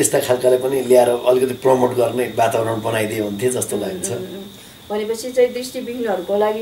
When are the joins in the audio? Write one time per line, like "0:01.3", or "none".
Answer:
none